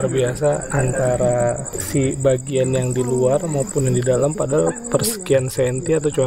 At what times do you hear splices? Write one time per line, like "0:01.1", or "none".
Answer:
none